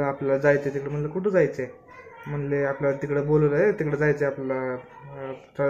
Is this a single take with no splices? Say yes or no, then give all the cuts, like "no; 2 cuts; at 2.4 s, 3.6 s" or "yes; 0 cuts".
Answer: yes; 0 cuts